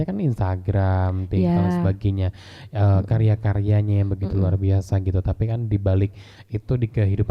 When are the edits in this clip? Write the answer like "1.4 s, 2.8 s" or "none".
none